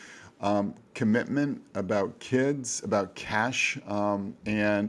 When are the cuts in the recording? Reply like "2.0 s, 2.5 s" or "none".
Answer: none